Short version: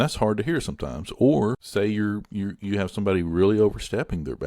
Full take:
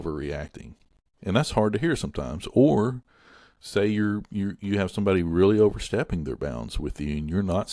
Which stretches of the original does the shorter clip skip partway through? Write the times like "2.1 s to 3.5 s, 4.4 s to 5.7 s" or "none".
3.0 s to 3.6 s